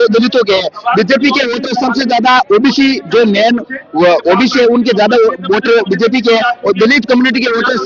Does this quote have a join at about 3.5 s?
no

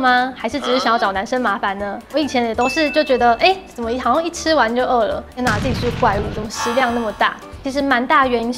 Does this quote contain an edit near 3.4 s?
no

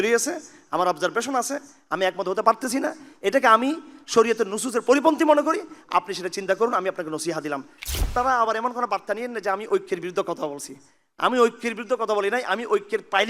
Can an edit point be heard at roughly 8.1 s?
yes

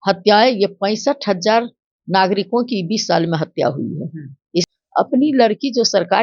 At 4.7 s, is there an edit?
yes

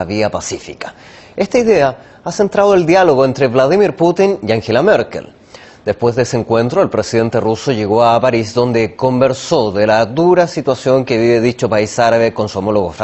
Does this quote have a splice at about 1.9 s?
yes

